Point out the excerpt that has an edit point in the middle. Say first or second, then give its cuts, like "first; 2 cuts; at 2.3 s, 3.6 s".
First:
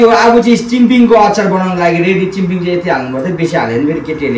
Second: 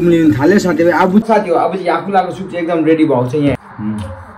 second; 2 cuts; at 1.3 s, 3.5 s